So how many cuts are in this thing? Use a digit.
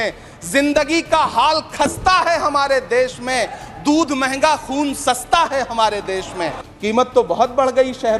1